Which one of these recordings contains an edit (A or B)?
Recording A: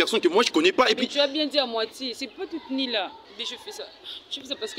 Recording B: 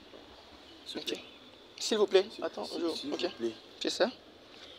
A